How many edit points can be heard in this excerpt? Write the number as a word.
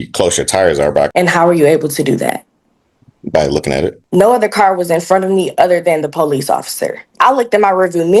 three